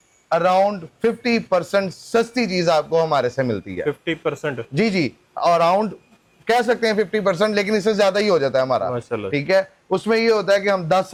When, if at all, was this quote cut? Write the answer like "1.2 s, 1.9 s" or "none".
none